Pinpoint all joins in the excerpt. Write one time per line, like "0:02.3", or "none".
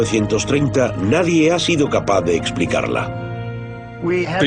0:01.7

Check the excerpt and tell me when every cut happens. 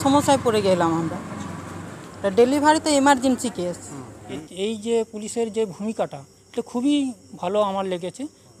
0:04.4

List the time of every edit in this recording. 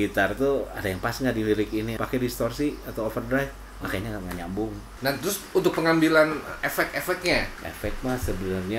0:01.9
0:04.9
0:07.6

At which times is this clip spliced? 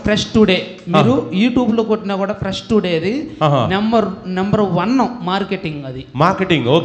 none

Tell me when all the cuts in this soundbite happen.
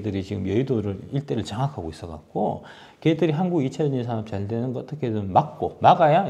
none

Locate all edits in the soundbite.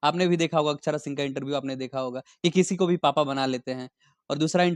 none

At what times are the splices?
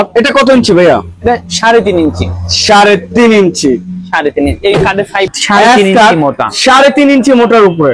0:05.4

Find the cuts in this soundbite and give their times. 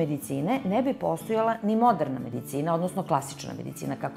none

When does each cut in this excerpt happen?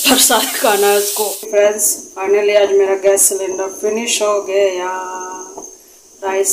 0:01.4

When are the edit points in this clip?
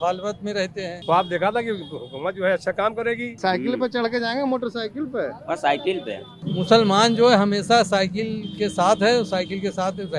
0:00.9
0:03.4
0:06.3

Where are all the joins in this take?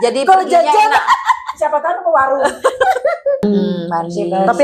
0:03.4

